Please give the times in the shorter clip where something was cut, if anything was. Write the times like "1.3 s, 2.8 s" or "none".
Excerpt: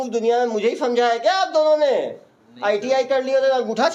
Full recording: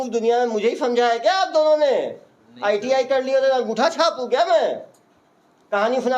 none